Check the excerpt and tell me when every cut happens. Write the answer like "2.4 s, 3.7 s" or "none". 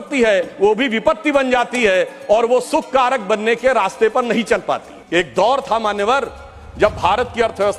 4.9 s